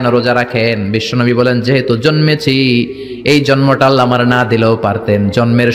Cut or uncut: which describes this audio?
uncut